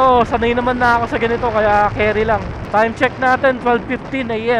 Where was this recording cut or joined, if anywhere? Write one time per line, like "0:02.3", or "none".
0:02.6